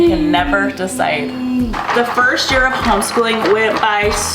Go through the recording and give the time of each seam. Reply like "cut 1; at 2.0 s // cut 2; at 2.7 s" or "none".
cut 1; at 1.7 s